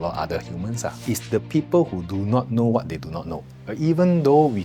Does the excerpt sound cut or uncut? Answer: cut